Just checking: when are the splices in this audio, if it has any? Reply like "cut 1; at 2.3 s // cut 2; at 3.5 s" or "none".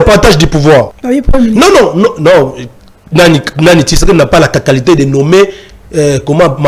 cut 1; at 1.0 s